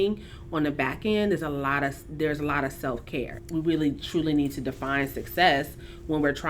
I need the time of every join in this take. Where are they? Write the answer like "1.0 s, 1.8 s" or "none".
3.4 s